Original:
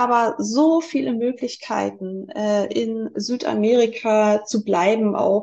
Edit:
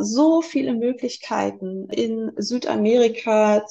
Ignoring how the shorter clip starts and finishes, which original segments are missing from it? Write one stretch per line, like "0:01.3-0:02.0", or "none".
0:02.3-0:02.7